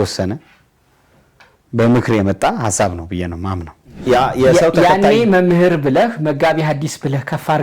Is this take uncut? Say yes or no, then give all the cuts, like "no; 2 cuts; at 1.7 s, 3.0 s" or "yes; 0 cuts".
no; 1 cut; at 4.0 s